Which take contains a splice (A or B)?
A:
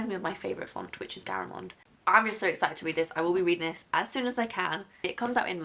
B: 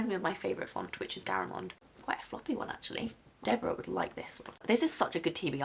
B